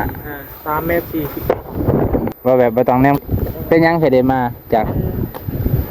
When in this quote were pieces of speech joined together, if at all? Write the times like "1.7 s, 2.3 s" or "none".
2.3 s